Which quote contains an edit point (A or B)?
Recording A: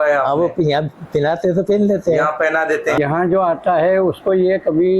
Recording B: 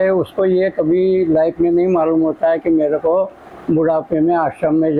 A